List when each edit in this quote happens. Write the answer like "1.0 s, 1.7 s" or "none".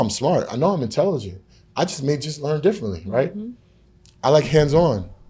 none